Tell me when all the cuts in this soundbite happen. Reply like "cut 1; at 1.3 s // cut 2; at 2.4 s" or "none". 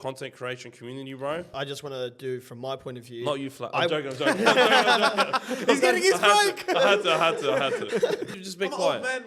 cut 1; at 1.5 s // cut 2; at 8.3 s